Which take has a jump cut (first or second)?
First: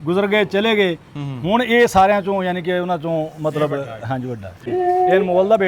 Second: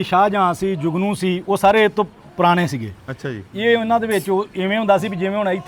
first